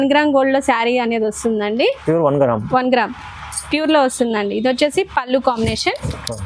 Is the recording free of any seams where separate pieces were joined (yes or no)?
yes